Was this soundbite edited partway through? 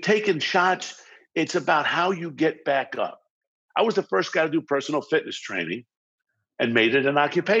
yes; 1 cut; at 3.5 s

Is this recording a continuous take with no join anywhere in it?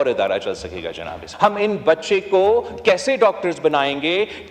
no; 1 cut; at 1.2 s

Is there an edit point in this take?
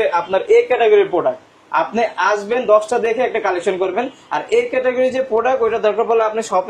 no; 0 cuts

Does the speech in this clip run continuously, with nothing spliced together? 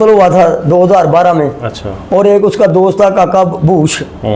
yes; 0 cuts

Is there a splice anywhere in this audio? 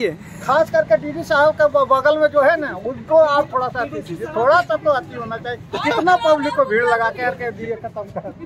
no; 0 cuts

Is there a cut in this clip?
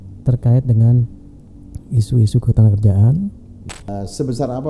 yes; 1 cut; at 3.7 s

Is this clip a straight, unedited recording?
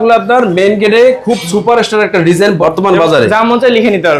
yes; 0 cuts

